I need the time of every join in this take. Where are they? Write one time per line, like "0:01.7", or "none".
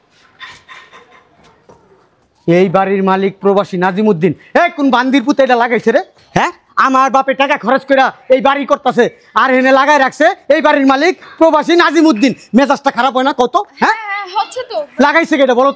none